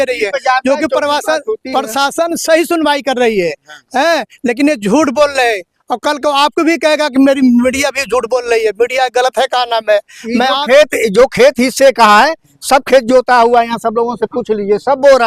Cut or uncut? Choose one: uncut